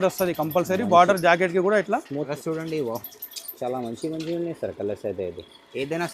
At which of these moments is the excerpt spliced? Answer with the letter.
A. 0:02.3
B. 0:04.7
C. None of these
A